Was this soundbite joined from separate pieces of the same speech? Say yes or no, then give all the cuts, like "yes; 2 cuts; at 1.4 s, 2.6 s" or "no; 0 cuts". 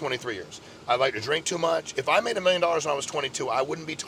no; 0 cuts